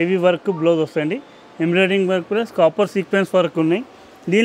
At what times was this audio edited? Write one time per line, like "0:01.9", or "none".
none